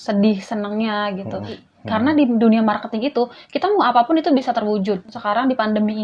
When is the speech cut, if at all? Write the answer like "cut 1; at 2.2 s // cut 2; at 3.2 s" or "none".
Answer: cut 1; at 1.6 s // cut 2; at 5.2 s